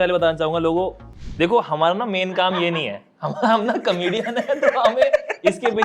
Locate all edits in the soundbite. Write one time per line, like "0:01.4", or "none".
none